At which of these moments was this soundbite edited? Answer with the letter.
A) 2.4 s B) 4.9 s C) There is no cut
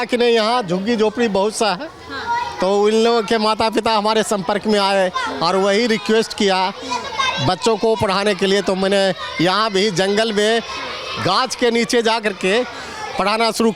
C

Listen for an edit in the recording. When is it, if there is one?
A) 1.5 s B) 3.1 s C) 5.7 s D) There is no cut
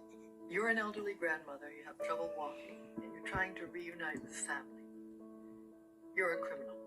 A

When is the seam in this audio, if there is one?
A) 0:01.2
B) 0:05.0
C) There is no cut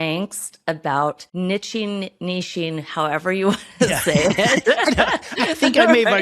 A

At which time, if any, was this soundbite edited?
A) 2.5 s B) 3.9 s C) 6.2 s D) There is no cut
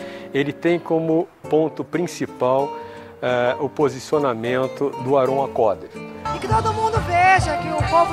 C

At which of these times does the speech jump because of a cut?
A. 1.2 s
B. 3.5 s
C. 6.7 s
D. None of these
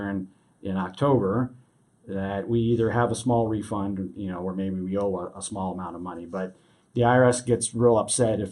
D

